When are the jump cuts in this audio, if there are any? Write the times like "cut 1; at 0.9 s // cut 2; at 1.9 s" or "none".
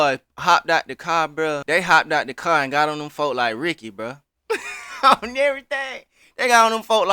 cut 1; at 1.6 s